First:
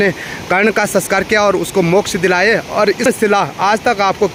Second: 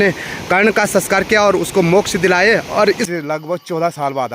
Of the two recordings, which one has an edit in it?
second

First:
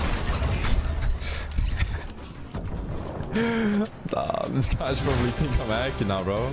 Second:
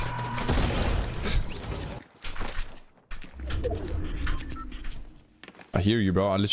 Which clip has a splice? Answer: second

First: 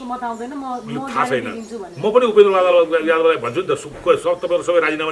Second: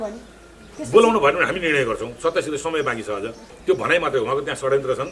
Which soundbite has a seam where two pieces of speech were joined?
second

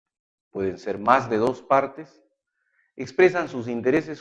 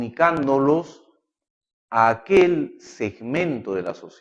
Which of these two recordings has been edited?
first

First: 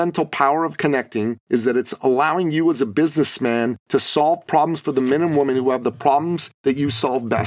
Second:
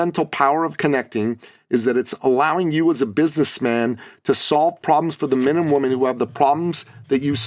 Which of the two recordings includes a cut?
first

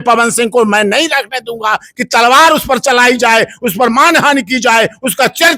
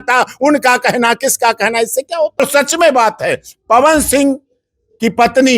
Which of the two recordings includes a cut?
second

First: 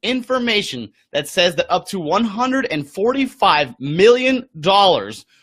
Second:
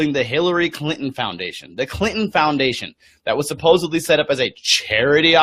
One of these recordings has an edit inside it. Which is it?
second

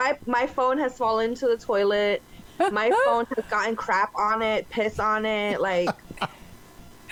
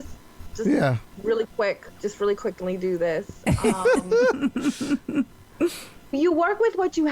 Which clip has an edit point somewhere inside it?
second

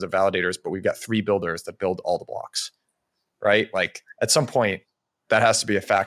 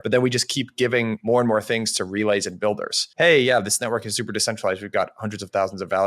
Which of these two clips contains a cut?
second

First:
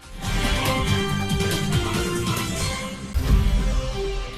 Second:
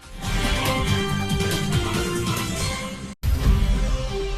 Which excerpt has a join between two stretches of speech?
second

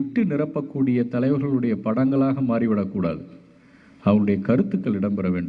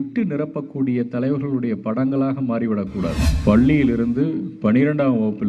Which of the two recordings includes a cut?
second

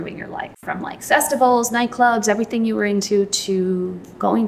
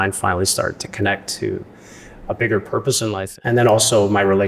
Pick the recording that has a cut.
second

